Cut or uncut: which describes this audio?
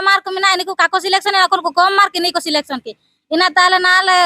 uncut